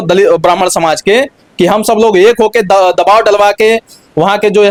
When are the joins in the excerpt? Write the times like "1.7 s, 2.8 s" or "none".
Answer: none